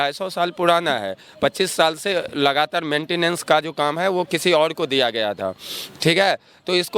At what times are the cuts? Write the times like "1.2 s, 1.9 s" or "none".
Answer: none